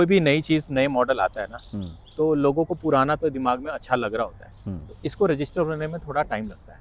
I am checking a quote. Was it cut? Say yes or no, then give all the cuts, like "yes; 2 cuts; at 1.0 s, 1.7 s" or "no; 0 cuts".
no; 0 cuts